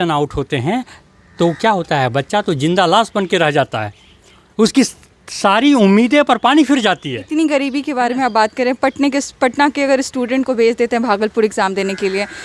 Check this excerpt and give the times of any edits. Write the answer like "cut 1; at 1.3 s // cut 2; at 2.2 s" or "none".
none